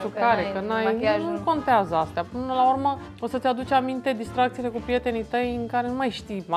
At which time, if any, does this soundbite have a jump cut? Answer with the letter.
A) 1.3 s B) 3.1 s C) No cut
B